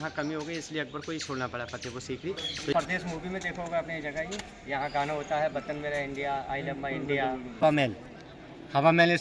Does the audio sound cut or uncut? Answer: cut